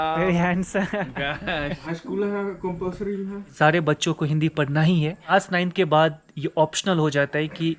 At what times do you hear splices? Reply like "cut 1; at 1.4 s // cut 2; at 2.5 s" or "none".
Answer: cut 1; at 1.8 s // cut 2; at 3.4 s // cut 3; at 5.3 s